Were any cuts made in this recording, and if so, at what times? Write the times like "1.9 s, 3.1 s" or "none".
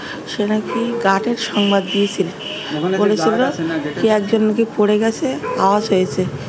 none